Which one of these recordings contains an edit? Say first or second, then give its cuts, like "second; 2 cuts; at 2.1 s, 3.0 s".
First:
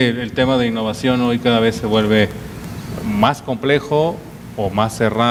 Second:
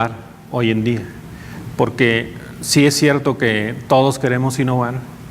second; 1 cut; at 2.1 s